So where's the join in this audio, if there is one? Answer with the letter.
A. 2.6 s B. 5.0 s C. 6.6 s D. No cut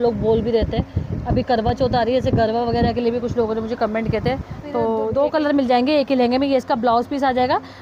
B